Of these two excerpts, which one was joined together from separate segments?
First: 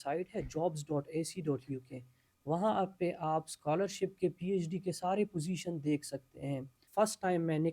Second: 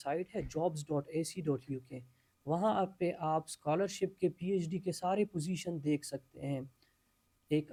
first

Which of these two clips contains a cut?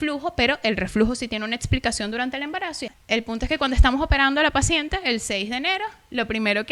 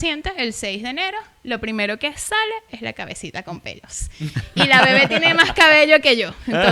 first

